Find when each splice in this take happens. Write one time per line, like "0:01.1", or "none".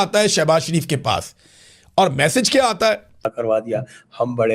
0:03.3